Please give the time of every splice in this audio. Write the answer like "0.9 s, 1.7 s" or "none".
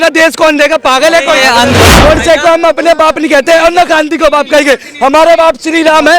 1.8 s